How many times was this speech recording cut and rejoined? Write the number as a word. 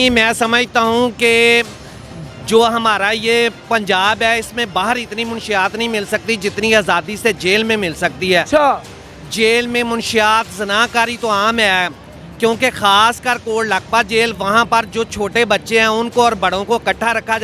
zero